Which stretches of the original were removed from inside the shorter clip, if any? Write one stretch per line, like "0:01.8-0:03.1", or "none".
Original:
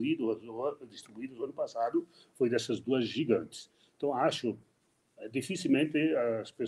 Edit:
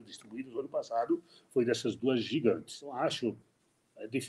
0:03.8-0:04.2